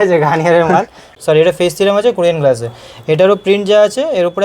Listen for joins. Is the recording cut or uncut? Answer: cut